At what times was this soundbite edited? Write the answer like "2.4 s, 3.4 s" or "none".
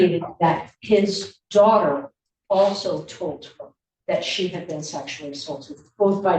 none